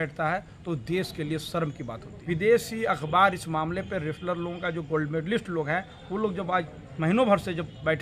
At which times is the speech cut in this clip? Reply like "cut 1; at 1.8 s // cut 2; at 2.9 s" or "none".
cut 1; at 2.1 s